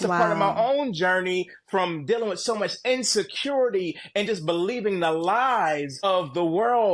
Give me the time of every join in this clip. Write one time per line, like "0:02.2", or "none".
0:06.0